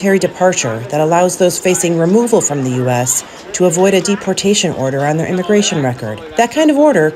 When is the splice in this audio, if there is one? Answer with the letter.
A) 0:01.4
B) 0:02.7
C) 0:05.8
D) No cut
D